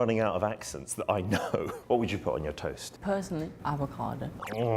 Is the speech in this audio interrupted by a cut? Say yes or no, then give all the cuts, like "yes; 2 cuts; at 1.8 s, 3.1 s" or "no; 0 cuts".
yes; 1 cut; at 1.8 s